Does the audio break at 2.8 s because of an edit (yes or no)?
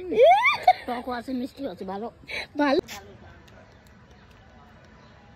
yes